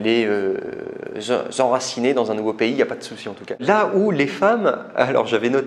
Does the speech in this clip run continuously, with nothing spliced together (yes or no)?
no